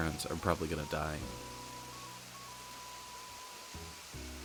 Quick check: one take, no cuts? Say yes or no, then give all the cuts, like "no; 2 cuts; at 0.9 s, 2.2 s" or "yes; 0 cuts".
yes; 0 cuts